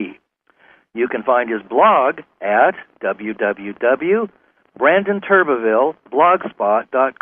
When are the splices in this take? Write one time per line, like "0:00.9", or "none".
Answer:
0:03.2